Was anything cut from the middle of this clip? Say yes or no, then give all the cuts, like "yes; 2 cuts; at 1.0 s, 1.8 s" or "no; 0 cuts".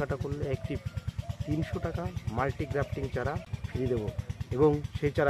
yes; 1 cut; at 3.6 s